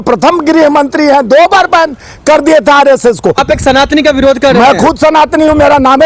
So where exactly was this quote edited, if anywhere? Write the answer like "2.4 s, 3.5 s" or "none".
3.4 s